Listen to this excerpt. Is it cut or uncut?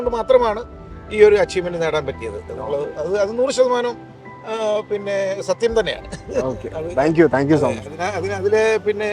uncut